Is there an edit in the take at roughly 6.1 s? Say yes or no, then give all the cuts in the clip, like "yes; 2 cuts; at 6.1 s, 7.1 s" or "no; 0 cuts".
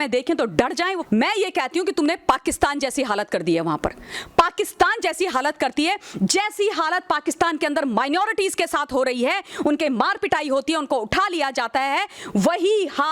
no; 1 cut; at 1.0 s